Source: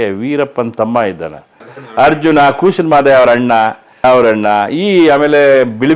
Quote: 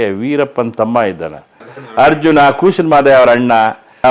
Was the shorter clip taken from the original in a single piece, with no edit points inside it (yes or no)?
yes